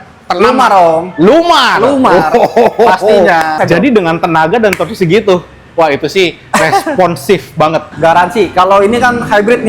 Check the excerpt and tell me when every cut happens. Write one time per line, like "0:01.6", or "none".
0:03.6
0:07.9